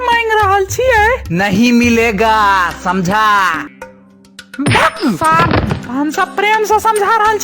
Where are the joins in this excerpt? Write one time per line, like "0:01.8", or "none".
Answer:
0:03.6